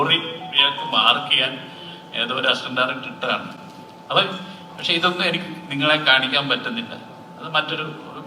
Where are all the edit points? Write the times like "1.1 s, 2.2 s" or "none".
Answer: none